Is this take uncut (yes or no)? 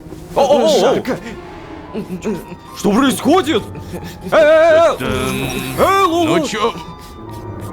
yes